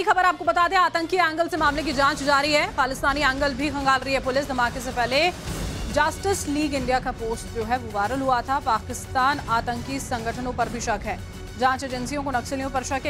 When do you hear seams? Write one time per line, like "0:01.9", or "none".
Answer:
0:04.5